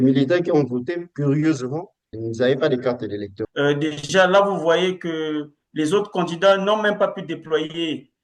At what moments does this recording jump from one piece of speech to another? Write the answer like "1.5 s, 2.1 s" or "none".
3.4 s